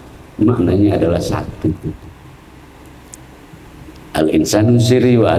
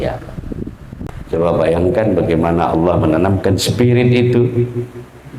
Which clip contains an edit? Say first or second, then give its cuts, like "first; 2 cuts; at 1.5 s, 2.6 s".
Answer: second; 1 cut; at 0.9 s